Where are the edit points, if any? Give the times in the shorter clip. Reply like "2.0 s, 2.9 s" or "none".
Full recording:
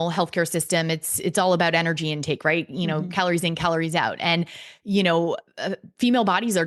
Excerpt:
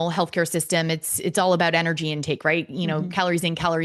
none